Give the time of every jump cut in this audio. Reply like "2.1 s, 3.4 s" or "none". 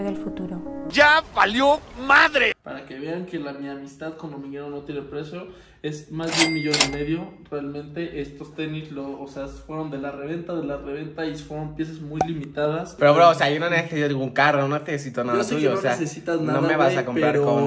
2.6 s, 12.9 s